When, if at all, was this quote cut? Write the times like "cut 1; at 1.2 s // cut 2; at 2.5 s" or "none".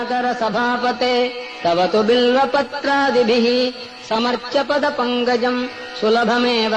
cut 1; at 1.0 s